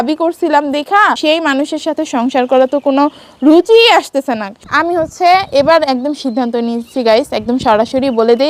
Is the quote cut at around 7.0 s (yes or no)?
no